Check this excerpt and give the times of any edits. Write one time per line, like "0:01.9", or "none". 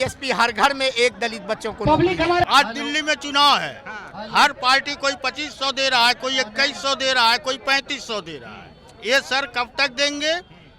0:02.4